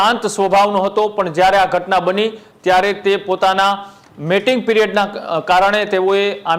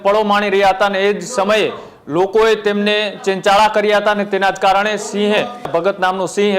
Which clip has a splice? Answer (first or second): second